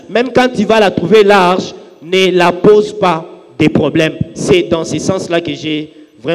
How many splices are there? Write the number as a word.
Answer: zero